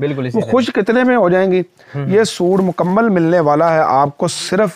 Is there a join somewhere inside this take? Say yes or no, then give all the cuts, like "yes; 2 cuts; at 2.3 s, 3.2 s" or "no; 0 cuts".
no; 0 cuts